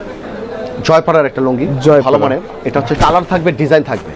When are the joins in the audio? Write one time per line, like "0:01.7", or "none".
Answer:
0:02.9